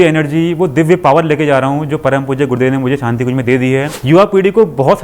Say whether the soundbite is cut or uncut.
cut